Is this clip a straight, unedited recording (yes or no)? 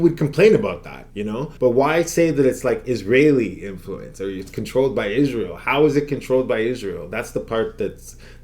yes